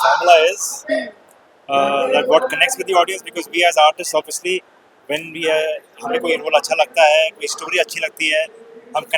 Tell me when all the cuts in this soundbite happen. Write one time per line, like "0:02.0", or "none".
none